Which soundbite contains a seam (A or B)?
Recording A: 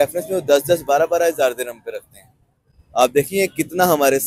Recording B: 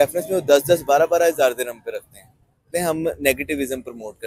B